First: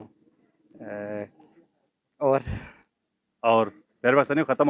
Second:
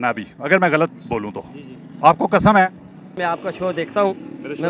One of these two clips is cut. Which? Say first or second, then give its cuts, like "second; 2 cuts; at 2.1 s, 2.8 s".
second; 1 cut; at 3.1 s